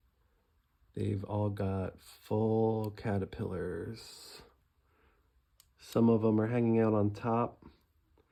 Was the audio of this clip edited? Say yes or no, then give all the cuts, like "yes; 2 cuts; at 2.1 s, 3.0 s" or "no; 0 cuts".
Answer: no; 0 cuts